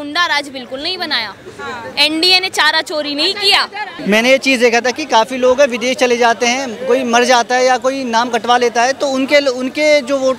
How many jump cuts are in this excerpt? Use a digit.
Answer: 1